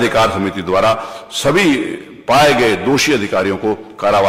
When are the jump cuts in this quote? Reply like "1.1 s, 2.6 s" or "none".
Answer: none